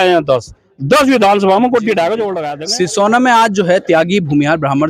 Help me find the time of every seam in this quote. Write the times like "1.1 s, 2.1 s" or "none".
2.4 s